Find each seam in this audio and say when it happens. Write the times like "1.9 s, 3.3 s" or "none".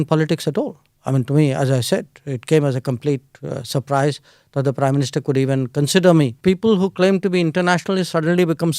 6.3 s